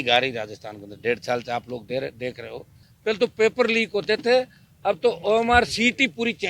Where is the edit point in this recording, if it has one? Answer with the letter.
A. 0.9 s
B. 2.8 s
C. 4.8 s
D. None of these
B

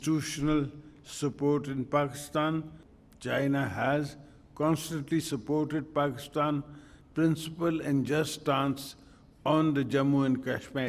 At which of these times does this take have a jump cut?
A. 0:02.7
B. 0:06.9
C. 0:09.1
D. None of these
A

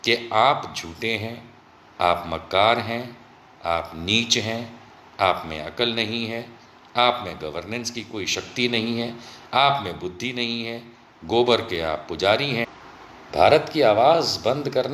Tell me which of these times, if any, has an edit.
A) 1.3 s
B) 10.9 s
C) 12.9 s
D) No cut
C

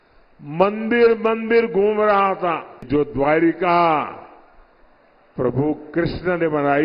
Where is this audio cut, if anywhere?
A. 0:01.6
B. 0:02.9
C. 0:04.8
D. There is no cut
B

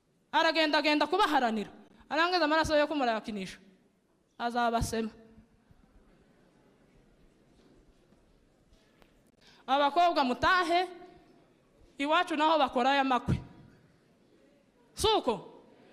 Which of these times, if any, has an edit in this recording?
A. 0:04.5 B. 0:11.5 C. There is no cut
C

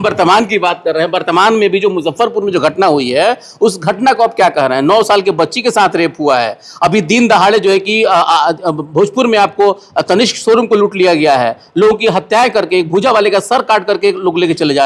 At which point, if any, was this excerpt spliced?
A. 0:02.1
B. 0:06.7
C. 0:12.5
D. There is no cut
D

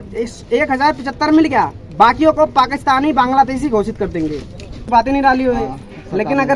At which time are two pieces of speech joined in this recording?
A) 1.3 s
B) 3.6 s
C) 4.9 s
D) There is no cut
C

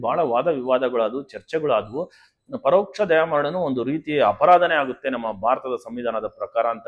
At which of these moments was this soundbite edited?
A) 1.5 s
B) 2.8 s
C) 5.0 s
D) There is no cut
D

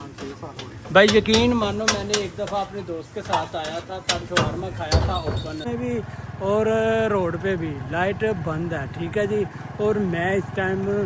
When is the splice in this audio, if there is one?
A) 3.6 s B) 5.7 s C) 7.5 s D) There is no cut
B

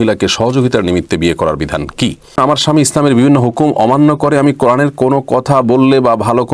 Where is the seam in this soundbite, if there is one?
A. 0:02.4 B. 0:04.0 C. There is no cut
A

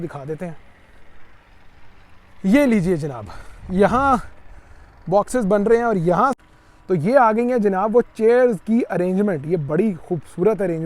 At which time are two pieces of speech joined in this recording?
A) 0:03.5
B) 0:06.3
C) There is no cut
B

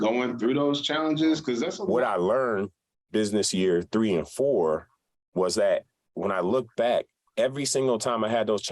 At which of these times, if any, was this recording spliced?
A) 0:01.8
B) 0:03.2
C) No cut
A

